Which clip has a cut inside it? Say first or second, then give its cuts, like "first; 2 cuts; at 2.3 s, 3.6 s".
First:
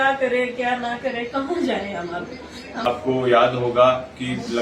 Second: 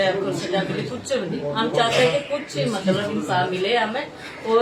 first; 1 cut; at 2.8 s